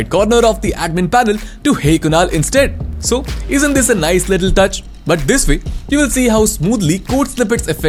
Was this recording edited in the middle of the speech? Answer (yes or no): no